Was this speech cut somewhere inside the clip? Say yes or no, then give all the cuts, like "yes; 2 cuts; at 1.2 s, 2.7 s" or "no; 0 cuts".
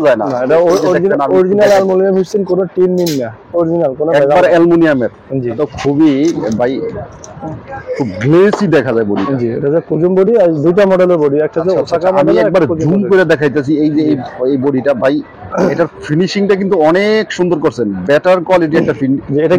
yes; 1 cut; at 5.6 s